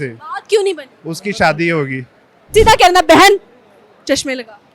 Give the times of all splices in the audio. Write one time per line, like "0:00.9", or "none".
0:02.5